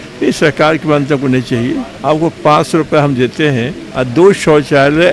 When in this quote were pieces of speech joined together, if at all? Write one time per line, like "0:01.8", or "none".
0:01.9
0:03.8